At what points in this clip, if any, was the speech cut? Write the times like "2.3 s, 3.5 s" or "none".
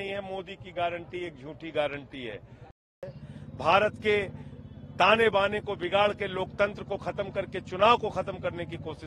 2.9 s